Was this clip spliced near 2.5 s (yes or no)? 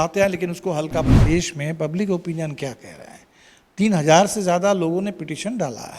no